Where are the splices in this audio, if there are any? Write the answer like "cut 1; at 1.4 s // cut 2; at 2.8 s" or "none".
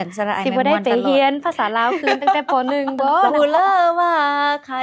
cut 1; at 3.3 s